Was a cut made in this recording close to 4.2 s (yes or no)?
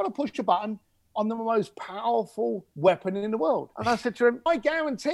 yes